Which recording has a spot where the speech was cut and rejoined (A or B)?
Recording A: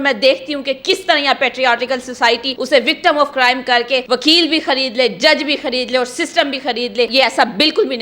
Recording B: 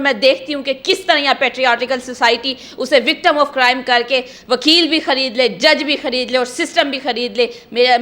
A